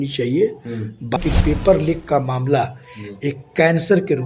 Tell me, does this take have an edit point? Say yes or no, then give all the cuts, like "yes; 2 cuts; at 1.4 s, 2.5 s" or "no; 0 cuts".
yes; 1 cut; at 1.2 s